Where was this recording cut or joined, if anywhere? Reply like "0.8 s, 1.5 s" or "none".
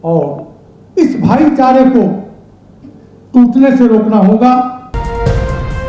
4.9 s